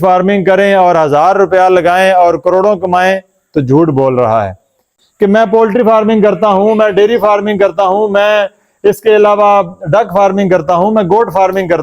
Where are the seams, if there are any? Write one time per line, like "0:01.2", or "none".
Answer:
0:05.0